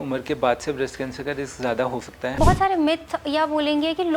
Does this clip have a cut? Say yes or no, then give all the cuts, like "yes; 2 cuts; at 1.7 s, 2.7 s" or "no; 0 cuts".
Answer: yes; 1 cut; at 2.3 s